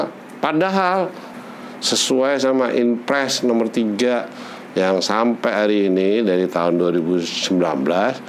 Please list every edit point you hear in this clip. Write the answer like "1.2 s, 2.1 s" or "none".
1.2 s